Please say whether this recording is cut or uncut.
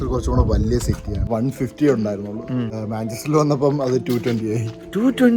cut